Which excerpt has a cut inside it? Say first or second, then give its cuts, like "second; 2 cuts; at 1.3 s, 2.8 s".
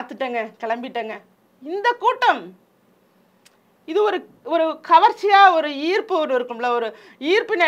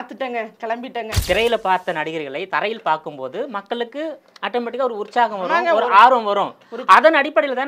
second; 1 cut; at 1.2 s